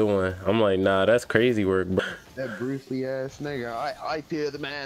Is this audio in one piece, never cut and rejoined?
no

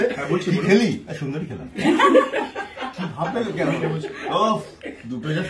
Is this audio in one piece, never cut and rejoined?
yes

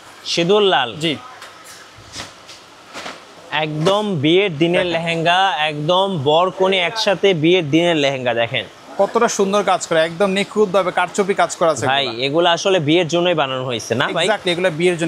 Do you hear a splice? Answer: no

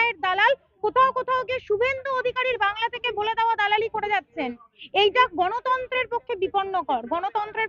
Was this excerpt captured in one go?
yes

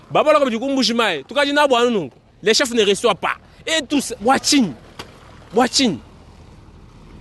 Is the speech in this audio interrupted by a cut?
no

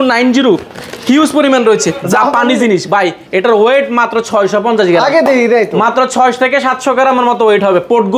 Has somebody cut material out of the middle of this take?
yes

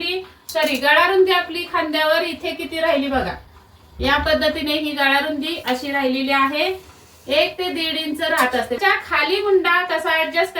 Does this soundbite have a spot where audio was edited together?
yes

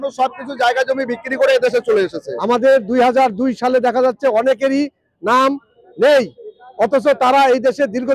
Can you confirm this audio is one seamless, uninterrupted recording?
no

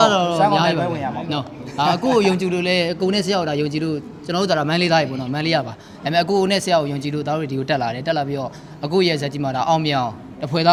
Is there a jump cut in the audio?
no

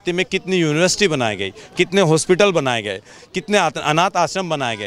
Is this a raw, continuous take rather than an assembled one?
yes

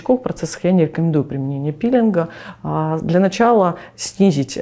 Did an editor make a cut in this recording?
no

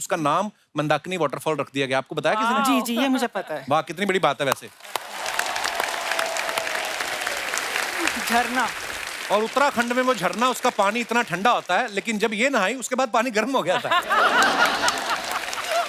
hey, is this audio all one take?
yes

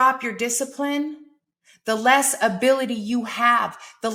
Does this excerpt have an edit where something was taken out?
no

